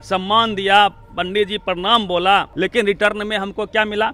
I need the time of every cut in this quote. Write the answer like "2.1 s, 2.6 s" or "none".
2.5 s